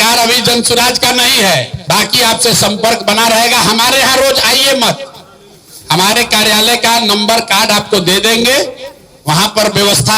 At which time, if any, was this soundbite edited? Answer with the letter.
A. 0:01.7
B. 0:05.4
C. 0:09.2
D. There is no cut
A